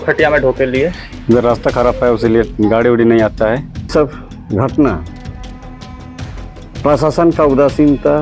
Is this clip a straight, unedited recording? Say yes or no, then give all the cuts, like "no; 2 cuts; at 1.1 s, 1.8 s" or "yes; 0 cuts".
no; 1 cut; at 3.8 s